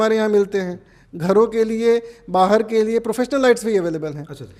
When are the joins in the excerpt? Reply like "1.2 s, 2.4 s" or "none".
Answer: none